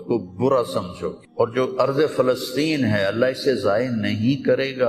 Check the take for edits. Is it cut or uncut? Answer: cut